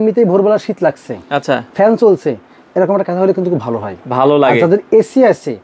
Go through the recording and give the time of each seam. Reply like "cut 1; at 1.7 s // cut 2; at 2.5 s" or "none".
none